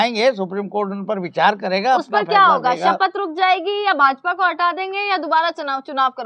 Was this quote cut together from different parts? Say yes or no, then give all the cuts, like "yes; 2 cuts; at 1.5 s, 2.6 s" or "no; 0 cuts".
no; 0 cuts